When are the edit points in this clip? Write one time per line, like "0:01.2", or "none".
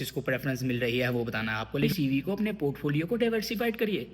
0:01.9